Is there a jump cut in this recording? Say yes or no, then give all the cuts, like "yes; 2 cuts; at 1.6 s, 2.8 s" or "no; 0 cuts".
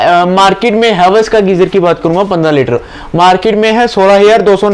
no; 0 cuts